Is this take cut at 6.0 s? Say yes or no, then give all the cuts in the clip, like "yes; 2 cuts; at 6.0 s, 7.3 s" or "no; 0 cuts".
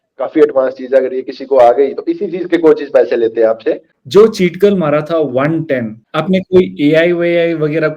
yes; 2 cuts; at 3.9 s, 6.0 s